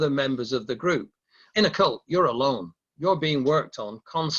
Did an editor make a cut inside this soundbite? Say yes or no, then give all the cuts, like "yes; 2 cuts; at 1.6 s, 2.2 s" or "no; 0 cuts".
yes; 1 cut; at 1.4 s